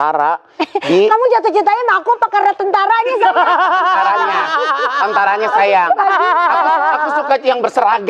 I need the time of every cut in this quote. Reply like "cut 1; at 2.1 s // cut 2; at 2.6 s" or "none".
none

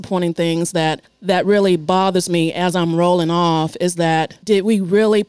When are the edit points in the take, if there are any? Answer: cut 1; at 1.1 s // cut 2; at 4.3 s

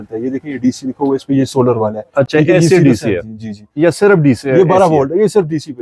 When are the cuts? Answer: none

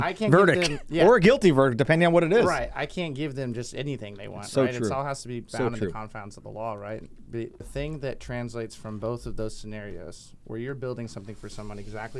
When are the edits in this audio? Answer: cut 1; at 7.7 s

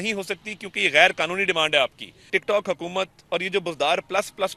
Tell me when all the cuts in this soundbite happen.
cut 1; at 2.1 s

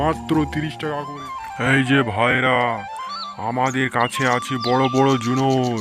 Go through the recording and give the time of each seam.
none

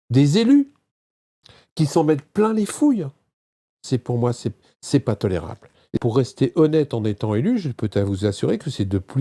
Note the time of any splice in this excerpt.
cut 1; at 6.0 s

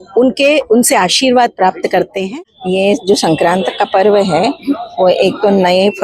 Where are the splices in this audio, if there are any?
cut 1; at 2.2 s

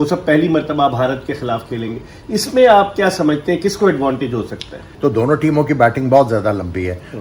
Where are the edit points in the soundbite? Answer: cut 1; at 4.9 s

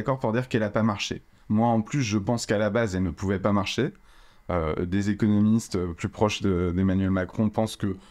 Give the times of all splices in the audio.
none

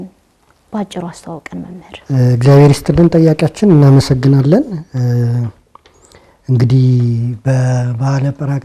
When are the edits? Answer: none

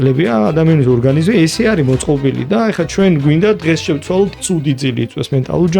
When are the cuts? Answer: cut 1; at 4.3 s

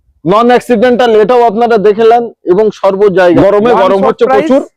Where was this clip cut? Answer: cut 1; at 3.4 s

